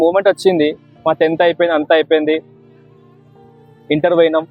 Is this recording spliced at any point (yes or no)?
no